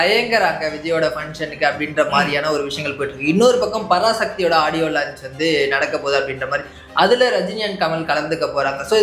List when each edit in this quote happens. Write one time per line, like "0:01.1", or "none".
none